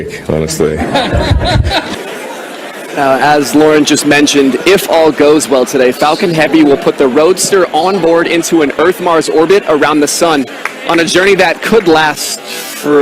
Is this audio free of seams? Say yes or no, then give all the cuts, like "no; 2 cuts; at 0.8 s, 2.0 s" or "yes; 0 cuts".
no; 1 cut; at 1.9 s